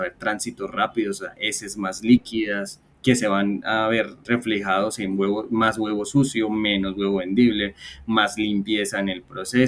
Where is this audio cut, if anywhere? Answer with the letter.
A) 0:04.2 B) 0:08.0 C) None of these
A